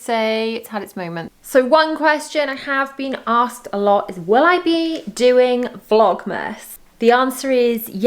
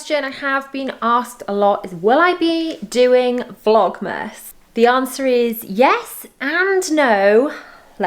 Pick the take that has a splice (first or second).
first